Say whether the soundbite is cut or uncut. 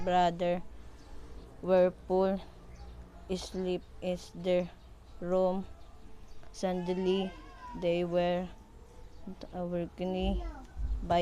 cut